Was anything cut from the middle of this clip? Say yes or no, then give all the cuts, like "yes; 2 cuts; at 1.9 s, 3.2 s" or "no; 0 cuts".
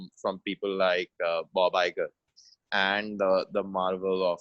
no; 0 cuts